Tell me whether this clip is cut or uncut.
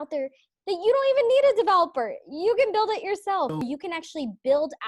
cut